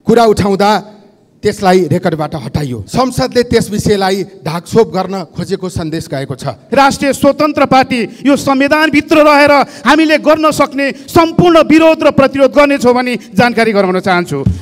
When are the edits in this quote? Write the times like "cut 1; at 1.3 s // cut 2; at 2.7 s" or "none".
cut 1; at 2.7 s // cut 2; at 6.6 s